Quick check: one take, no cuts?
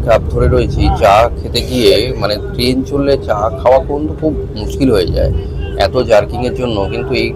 yes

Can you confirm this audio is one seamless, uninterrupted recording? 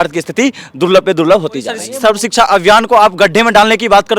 no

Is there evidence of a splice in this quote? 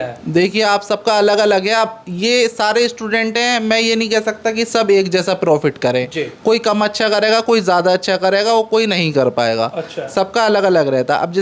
no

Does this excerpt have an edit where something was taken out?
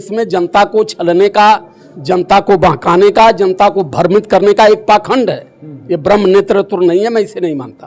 no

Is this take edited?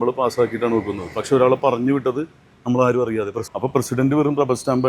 yes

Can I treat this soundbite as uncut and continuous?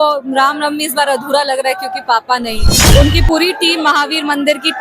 no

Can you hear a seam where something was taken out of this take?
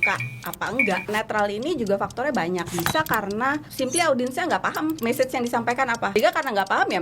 yes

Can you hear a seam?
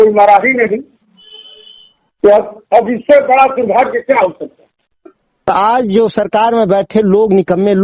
yes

